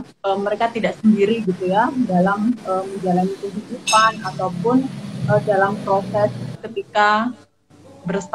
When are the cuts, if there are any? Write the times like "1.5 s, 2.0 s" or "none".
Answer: 6.5 s